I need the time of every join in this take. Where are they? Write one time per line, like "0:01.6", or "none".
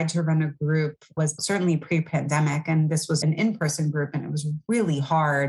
0:01.2
0:03.2